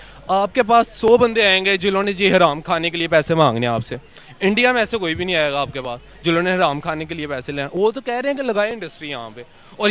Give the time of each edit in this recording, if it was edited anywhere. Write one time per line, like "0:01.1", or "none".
none